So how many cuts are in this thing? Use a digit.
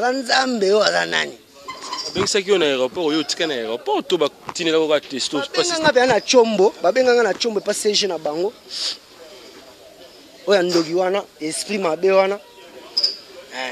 0